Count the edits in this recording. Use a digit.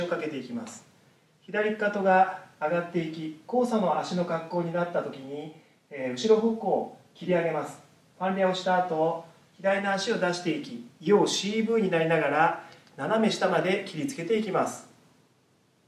0